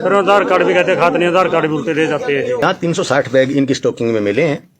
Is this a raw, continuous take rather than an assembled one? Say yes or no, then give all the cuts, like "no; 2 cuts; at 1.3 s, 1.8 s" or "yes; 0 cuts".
no; 1 cut; at 2.6 s